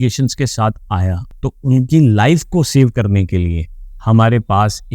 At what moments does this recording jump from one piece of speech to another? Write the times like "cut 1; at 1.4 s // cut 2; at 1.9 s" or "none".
cut 1; at 1.3 s